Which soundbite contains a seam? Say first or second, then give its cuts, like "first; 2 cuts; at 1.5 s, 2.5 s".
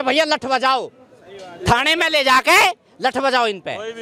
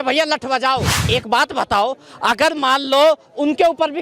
second; 1 cut; at 1.0 s